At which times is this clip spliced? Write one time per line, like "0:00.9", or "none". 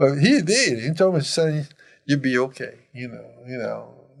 none